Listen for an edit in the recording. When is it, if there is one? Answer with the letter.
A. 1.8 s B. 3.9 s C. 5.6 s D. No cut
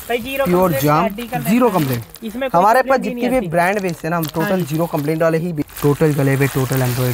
C